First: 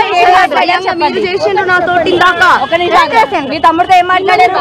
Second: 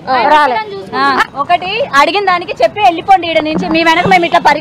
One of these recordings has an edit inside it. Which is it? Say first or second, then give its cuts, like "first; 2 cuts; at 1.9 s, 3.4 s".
first; 1 cut; at 2.1 s